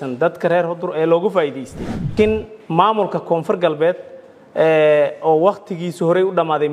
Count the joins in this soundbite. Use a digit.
1